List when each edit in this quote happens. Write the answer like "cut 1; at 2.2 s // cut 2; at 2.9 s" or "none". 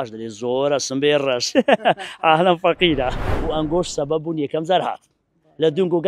cut 1; at 3.3 s